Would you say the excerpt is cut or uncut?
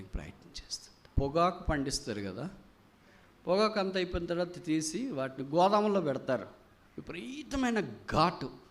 cut